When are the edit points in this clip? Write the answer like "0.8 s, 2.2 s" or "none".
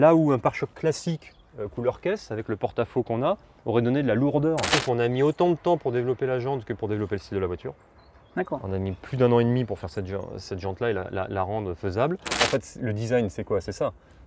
4.7 s, 12.3 s